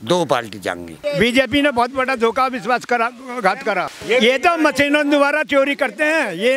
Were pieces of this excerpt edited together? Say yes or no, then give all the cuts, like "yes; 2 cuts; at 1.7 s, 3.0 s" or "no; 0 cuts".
yes; 2 cuts; at 0.9 s, 3.9 s